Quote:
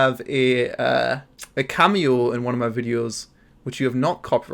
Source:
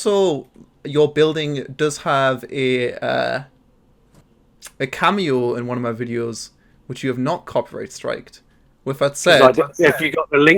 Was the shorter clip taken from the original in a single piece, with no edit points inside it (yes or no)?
no